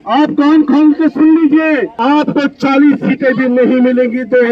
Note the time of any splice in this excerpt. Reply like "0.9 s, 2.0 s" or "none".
1.9 s

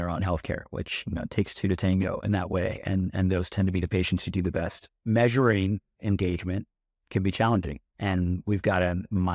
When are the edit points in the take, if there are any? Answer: none

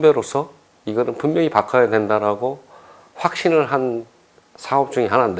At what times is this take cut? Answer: none

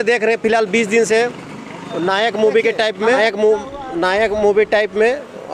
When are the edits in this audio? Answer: 3.2 s

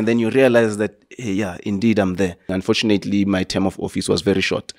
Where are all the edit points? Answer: 2.5 s

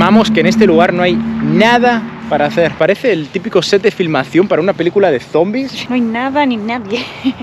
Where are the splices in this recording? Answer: 2.7 s, 5.8 s

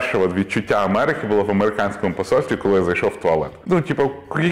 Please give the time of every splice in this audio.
3.6 s

